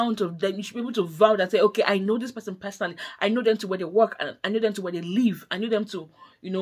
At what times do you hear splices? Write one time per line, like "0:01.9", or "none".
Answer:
none